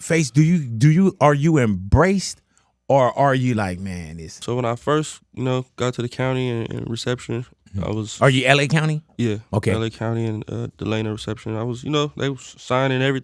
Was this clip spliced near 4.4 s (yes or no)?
yes